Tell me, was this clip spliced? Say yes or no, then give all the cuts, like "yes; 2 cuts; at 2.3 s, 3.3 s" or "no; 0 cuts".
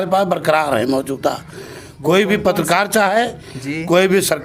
no; 0 cuts